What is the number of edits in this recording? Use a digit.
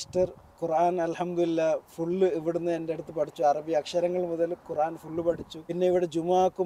1